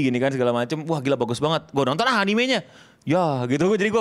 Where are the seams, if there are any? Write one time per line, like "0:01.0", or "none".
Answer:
none